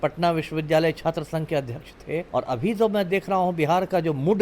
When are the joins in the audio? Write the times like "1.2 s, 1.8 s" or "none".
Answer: 2.3 s